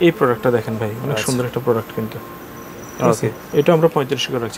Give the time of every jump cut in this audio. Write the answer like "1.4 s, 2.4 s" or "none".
none